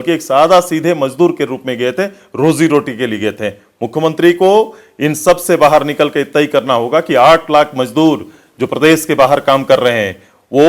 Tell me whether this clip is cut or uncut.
uncut